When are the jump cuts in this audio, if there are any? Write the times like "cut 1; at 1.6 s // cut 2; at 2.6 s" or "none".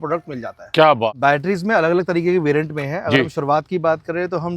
cut 1; at 1.1 s